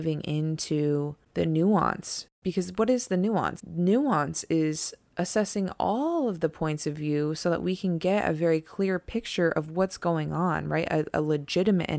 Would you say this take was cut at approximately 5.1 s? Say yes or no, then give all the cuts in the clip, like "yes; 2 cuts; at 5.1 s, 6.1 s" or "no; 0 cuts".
no; 3 cuts; at 1.2 s, 2.4 s, 3.6 s